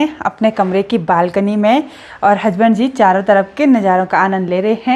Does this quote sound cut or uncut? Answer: uncut